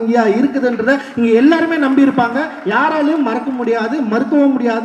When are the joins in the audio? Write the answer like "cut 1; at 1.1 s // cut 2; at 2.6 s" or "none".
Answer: none